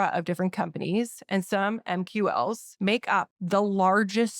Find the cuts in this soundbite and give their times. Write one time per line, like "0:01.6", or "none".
0:03.1